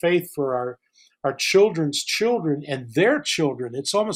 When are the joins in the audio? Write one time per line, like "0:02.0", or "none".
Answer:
none

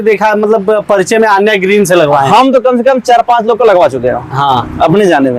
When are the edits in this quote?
none

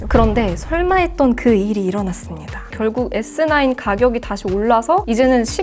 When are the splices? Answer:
0:02.7

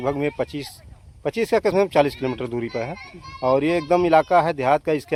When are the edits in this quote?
none

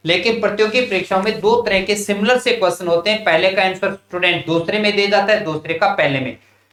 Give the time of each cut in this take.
none

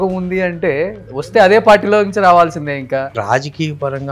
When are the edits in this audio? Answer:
0:03.2

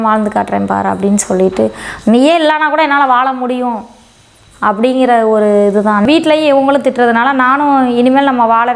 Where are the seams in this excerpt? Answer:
0:06.0

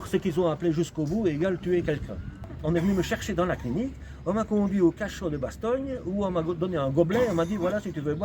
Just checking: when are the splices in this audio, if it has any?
0:02.5

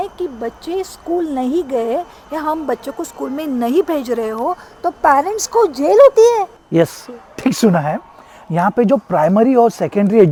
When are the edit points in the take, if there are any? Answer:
none

